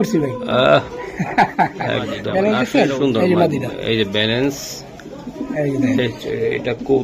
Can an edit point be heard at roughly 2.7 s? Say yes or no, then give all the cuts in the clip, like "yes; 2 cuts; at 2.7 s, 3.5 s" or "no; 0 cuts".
yes; 1 cut; at 2.7 s